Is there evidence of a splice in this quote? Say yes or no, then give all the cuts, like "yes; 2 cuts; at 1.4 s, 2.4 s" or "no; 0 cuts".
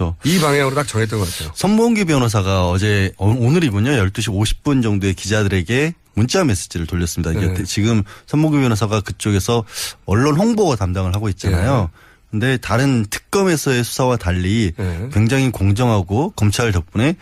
yes; 1 cut; at 7.5 s